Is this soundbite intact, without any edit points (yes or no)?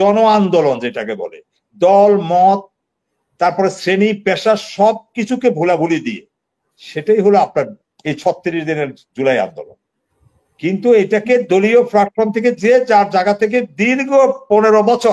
yes